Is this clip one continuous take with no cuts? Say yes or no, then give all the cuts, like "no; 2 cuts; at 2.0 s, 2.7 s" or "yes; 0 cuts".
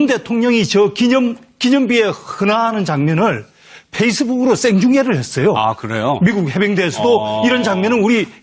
yes; 0 cuts